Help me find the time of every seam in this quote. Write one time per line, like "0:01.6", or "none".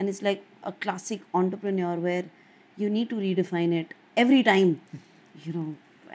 none